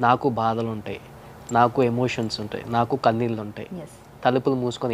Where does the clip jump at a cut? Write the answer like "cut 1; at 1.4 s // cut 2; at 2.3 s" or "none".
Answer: none